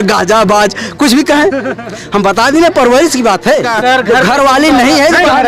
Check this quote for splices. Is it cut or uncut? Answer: cut